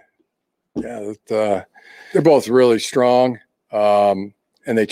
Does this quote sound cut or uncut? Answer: cut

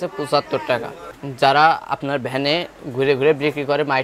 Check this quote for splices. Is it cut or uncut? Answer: cut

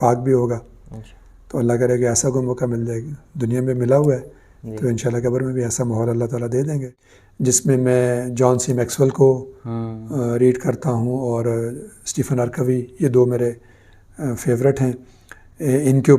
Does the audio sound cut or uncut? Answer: cut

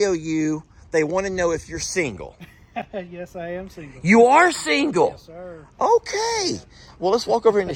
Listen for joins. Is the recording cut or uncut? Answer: uncut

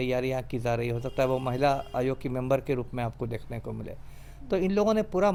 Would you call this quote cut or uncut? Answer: uncut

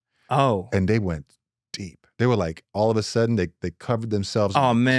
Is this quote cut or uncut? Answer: uncut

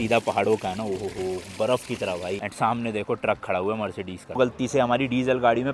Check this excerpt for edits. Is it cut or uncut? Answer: cut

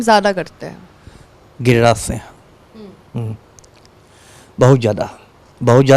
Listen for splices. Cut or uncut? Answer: uncut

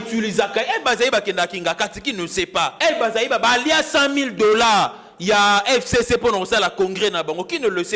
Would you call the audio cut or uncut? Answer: cut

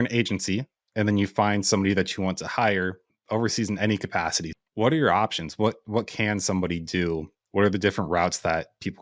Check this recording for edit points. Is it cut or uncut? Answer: cut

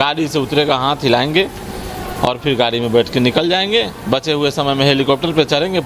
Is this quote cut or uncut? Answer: uncut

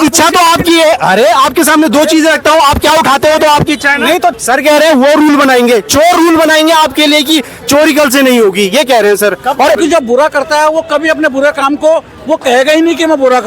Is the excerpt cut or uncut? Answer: cut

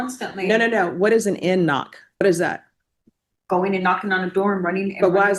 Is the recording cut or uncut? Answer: cut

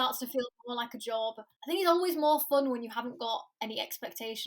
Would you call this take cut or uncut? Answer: cut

